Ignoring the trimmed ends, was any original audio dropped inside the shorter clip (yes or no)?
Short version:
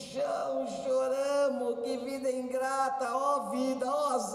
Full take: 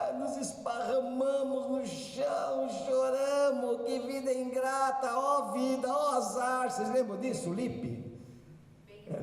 no